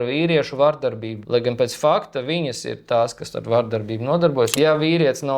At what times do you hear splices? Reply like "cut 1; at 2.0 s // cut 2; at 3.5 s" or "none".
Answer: cut 1; at 1.1 s // cut 2; at 4.5 s